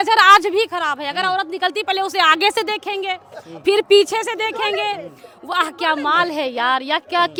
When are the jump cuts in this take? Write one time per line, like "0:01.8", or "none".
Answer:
none